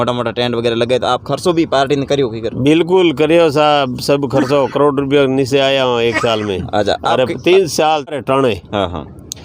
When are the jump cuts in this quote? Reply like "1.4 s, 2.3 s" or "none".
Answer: 8.2 s